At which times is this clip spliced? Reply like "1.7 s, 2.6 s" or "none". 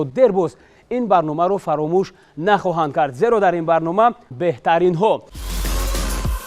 5.4 s